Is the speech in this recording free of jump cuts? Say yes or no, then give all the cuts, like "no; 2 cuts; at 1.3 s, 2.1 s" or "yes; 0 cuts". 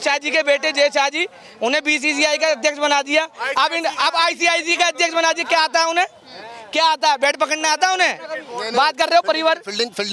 yes; 0 cuts